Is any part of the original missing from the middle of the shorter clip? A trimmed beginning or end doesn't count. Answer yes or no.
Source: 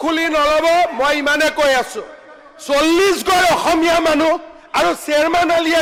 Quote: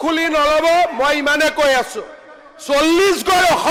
no